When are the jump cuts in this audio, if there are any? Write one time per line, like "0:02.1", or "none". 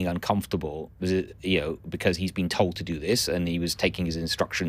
none